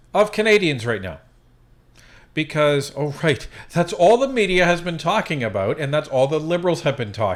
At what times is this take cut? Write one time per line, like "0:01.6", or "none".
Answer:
none